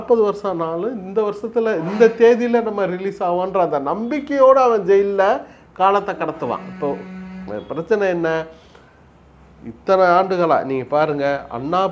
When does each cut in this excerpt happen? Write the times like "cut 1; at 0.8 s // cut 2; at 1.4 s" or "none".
none